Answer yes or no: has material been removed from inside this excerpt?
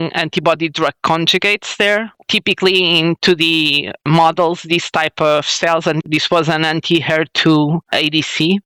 no